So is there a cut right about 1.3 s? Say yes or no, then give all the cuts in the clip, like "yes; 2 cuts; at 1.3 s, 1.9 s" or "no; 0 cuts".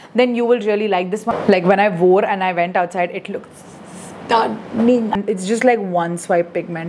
yes; 2 cuts; at 1.3 s, 5.1 s